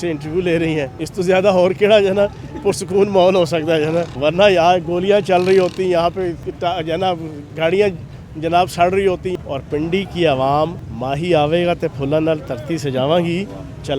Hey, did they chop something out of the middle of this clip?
yes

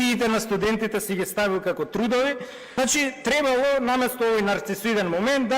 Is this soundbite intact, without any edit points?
no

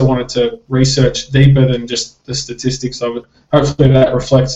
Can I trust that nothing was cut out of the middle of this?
no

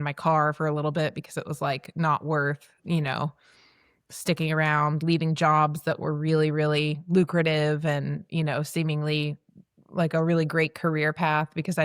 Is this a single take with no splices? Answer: yes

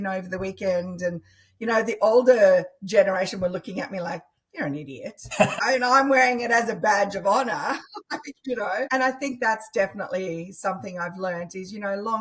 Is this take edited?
yes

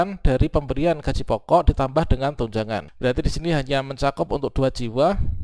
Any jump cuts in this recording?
yes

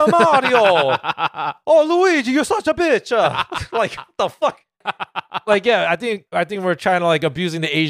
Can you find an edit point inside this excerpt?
yes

